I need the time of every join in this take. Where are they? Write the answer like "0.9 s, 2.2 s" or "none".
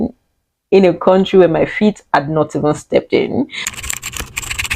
3.6 s